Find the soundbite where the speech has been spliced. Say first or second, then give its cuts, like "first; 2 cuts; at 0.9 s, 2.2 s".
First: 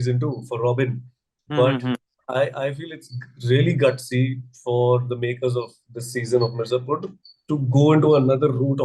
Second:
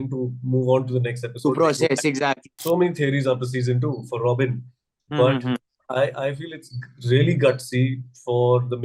second; 1 cut; at 2.5 s